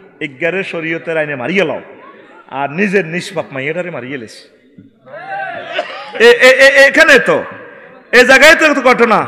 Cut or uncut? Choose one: uncut